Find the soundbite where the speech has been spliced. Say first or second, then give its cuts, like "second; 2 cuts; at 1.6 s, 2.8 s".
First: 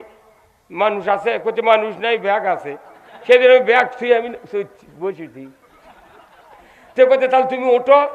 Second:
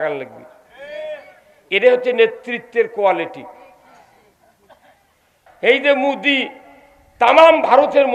second; 1 cut; at 5.4 s